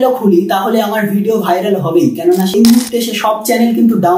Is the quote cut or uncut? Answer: cut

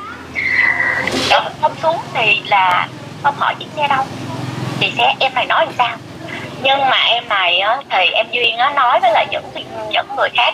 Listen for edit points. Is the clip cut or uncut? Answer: cut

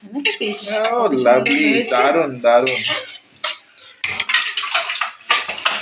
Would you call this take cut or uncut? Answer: cut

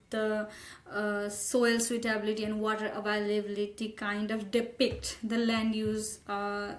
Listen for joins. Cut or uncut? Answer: uncut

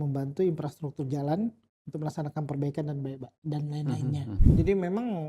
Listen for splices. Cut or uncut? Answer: cut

